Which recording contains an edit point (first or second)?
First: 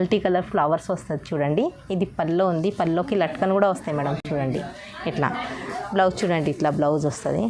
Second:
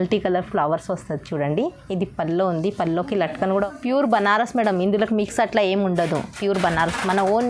second